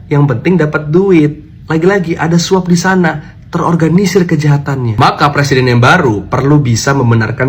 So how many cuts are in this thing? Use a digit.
0